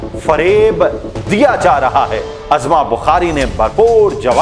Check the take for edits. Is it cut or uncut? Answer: cut